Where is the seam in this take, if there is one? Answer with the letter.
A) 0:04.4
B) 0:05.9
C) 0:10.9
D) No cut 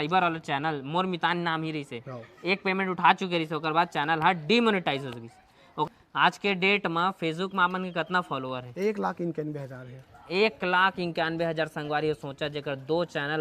B